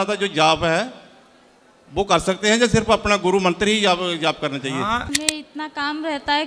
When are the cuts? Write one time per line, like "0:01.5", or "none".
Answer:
0:05.1